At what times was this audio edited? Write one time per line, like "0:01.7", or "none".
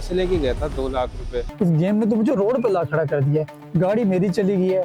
0:01.5